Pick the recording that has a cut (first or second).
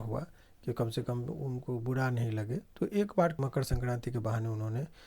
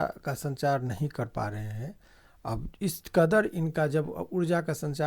first